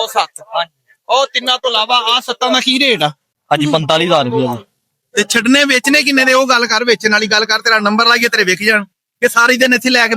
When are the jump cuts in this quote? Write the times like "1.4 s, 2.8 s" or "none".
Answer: 3.3 s

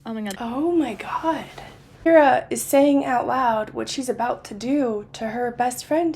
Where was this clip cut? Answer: 1.9 s

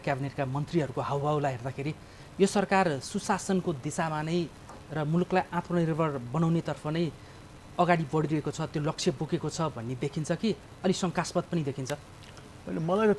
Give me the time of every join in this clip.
none

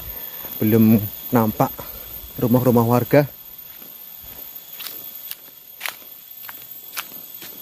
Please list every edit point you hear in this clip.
none

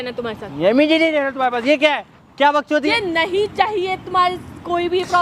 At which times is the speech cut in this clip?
2.9 s

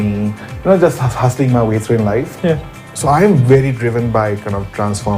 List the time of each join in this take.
2.8 s

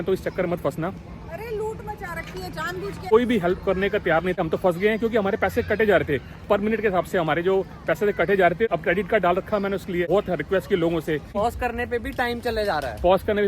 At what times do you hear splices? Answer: 3.0 s, 4.4 s, 8.7 s, 10.1 s, 11.3 s

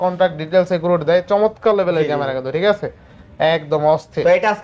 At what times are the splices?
none

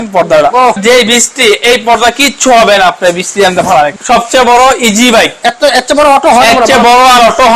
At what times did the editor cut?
0.8 s, 3.9 s

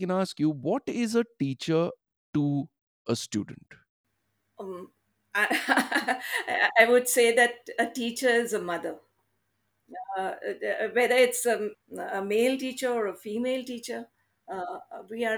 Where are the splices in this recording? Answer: 9.2 s, 11.8 s

